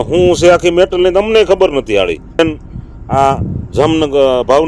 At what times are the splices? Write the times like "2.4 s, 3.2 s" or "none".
2.4 s